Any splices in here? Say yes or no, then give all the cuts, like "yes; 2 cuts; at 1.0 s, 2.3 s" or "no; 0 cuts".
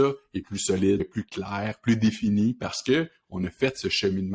yes; 1 cut; at 1.1 s